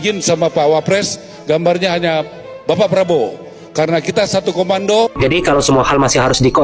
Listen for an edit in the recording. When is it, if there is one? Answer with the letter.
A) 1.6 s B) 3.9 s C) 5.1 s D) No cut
C